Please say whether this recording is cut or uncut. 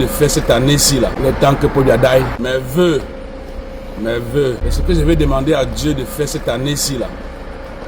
cut